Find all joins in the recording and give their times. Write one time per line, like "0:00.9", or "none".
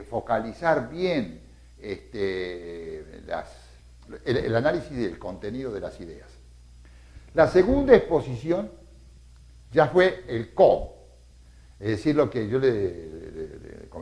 0:08.2